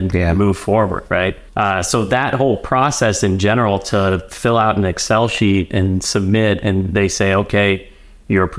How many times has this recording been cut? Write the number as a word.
one